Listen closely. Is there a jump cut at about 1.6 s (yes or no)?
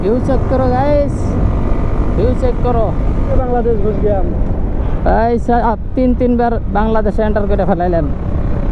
no